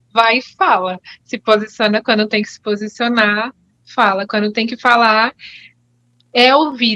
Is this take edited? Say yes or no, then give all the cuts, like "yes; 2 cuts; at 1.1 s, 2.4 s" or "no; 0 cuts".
no; 0 cuts